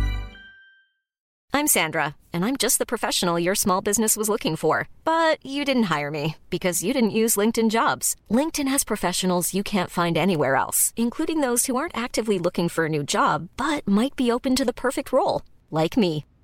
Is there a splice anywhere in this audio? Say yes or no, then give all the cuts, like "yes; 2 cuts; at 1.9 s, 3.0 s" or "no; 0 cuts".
yes; 1 cut; at 1.3 s